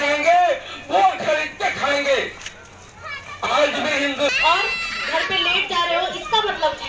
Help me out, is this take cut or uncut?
cut